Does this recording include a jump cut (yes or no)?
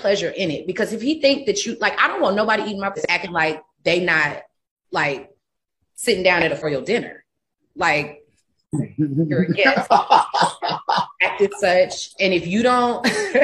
yes